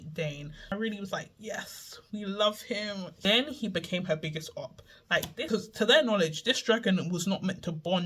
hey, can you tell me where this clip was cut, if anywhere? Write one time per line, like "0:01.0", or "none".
0:00.7
0:03.2
0:05.4